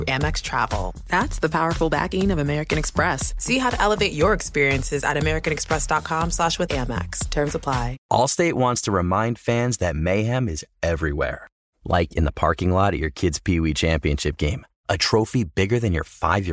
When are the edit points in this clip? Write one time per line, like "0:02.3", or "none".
0:08.0